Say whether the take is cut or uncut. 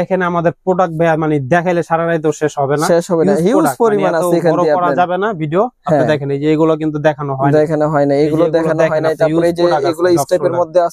uncut